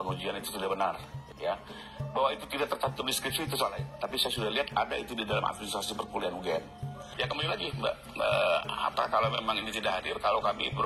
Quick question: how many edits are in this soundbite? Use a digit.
2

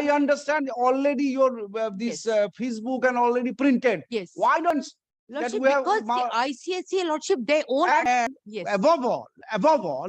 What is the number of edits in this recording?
2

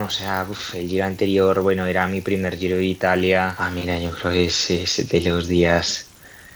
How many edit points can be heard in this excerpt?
1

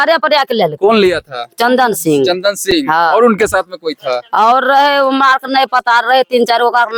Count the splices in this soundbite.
0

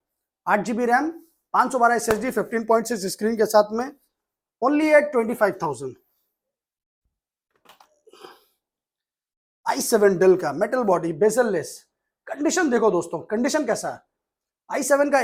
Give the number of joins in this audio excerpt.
0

